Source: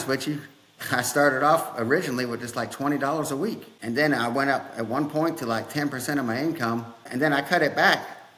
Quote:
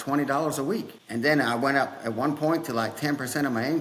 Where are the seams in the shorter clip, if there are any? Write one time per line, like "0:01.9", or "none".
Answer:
none